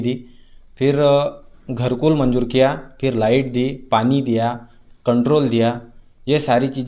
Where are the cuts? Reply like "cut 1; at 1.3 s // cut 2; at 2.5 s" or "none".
none